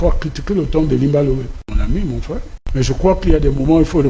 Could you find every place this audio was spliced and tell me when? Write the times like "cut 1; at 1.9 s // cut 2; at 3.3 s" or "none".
cut 1; at 1.8 s // cut 2; at 2.6 s